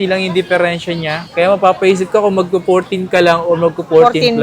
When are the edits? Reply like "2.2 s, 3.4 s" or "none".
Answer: 1.2 s